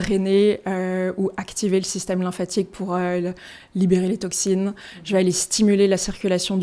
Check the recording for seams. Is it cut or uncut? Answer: uncut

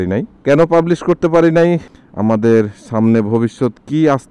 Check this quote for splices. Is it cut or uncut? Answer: cut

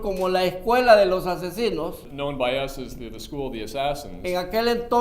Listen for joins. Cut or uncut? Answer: cut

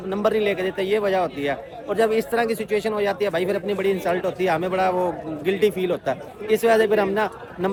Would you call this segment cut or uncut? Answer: uncut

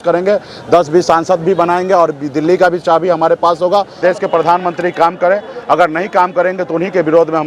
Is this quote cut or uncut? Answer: cut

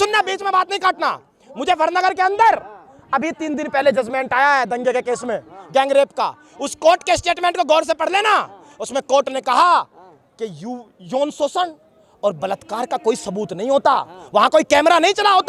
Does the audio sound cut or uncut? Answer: uncut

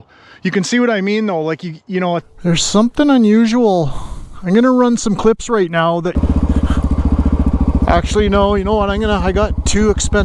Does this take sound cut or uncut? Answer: cut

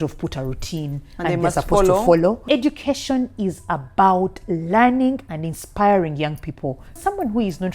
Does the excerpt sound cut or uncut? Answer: cut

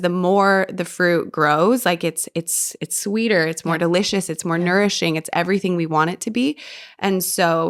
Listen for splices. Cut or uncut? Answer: uncut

